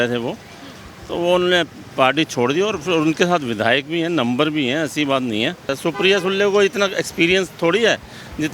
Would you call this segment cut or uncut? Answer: cut